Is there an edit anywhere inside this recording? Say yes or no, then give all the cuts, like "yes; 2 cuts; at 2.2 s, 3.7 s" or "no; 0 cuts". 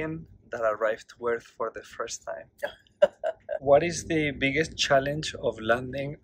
yes; 1 cut; at 3.6 s